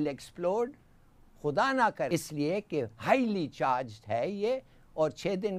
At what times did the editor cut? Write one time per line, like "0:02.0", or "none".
0:02.1